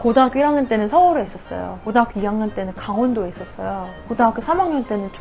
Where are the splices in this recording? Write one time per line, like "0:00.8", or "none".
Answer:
none